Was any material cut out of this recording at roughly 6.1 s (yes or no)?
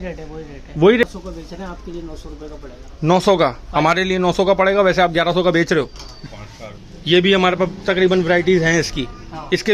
yes